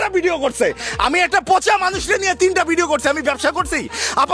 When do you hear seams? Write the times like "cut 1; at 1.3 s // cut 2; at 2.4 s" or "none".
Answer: none